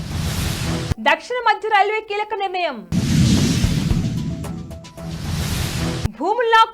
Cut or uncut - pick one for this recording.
cut